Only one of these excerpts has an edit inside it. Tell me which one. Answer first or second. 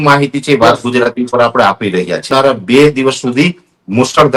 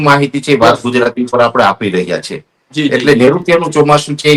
first